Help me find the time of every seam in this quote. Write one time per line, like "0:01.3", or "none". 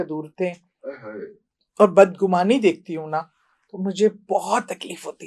none